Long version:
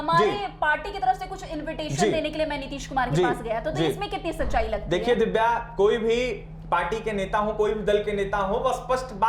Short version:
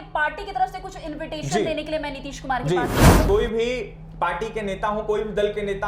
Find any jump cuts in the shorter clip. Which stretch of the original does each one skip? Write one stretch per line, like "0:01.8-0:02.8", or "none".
0:03.7-0:05.7